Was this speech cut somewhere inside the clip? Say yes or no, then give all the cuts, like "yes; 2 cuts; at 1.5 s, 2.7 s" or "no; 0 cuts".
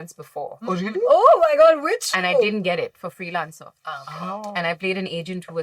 no; 0 cuts